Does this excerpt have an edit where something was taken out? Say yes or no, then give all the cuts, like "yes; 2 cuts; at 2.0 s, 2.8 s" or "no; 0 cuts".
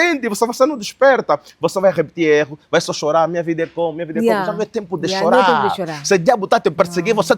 no; 0 cuts